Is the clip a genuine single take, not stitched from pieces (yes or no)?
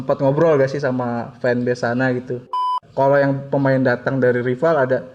no